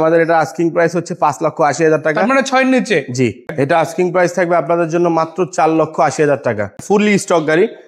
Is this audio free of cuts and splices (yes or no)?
no